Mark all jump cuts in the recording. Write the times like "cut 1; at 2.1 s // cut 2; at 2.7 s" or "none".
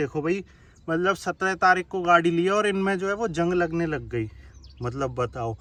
none